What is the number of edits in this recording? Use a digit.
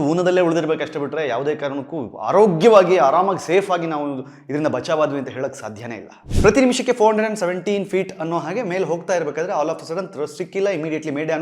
1